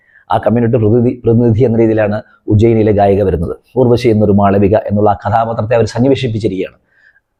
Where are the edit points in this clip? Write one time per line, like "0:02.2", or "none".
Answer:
none